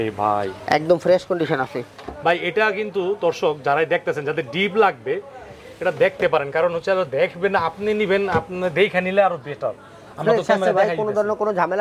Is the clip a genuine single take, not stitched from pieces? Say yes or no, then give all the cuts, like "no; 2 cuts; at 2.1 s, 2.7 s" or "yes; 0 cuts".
yes; 0 cuts